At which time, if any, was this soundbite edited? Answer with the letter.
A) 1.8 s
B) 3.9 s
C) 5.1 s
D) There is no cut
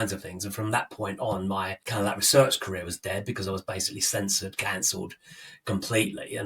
A